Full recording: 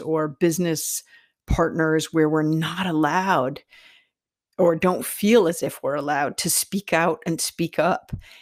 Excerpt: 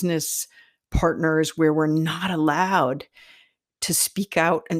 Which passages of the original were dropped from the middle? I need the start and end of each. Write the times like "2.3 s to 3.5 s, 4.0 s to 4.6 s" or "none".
4.4 s to 6.4 s